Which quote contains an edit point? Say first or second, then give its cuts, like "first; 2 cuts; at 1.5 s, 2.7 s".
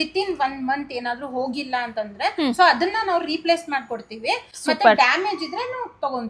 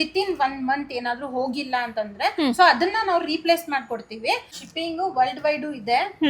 second; 1 cut; at 4.5 s